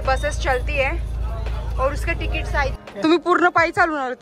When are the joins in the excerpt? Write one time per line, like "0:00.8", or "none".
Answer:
0:02.8